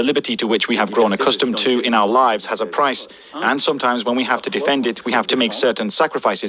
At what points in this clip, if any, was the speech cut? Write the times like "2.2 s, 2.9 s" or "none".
2.2 s